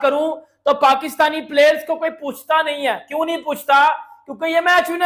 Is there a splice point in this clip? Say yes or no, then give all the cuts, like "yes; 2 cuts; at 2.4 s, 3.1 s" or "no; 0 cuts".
no; 0 cuts